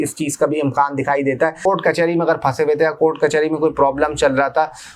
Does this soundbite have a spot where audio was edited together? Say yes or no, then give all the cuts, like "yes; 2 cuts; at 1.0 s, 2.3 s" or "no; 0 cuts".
yes; 1 cut; at 1.7 s